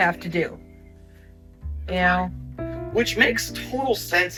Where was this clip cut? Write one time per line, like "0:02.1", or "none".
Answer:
none

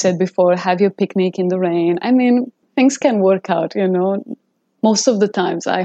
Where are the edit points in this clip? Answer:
0:02.6

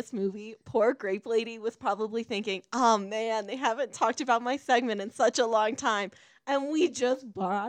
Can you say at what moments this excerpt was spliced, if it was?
none

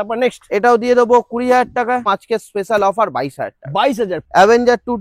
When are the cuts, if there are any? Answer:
0:02.1
0:04.2

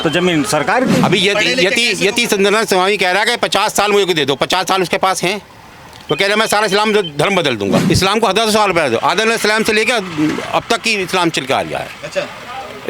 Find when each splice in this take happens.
0:01.0
0:07.8

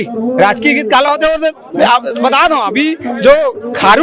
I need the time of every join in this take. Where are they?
none

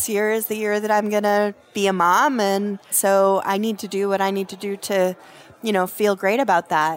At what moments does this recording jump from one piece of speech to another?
0:01.6
0:02.9

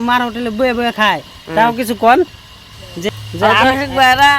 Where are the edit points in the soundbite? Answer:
0:03.0

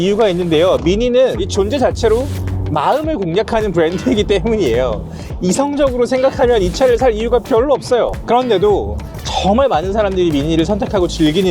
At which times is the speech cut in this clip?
0:08.2

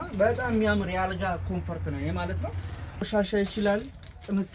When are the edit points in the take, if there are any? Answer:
0:03.1

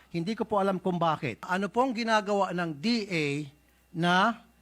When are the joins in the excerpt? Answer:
0:01.5

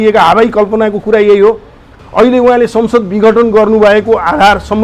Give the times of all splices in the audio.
0:01.9

